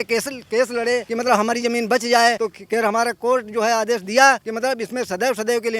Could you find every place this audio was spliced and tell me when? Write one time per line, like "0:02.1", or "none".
0:01.1
0:02.5
0:04.5